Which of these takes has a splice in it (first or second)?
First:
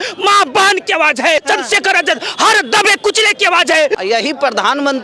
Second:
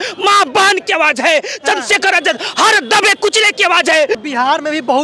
first